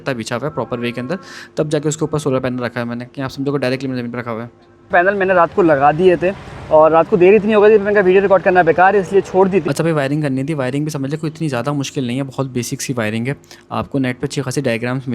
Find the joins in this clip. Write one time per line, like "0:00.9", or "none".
0:09.7